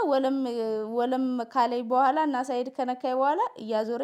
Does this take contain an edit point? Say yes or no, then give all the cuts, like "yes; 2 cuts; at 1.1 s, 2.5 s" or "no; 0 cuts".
no; 0 cuts